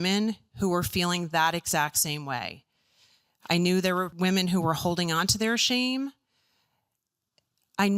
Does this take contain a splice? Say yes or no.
yes